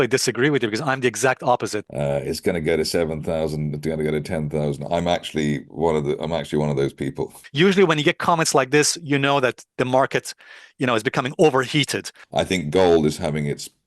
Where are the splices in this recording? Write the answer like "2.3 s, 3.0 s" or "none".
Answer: 1.8 s, 7.4 s, 12.2 s